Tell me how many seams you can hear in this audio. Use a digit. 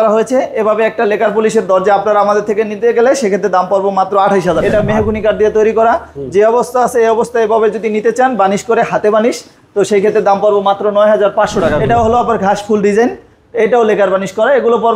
2